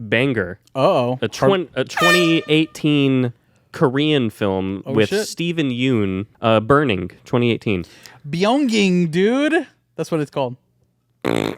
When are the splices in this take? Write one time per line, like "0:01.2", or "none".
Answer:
0:06.3